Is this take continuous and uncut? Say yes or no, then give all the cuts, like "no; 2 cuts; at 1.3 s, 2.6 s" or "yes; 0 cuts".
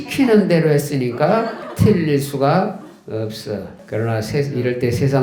no; 2 cuts; at 1.6 s, 3.8 s